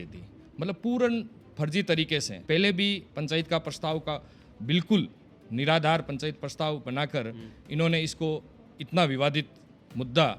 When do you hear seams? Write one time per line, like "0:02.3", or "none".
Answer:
0:02.3